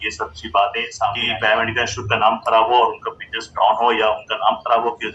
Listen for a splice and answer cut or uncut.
cut